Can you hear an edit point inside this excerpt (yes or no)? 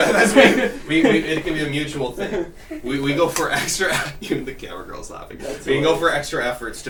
no